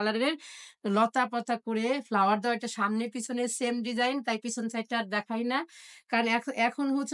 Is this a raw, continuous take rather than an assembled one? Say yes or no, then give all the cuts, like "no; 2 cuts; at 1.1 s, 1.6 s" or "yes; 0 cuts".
yes; 0 cuts